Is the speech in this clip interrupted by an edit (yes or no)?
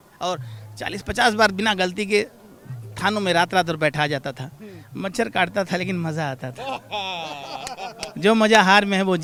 no